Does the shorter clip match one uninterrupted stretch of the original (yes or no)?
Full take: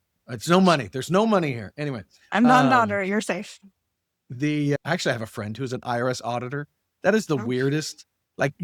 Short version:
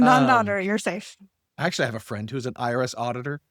no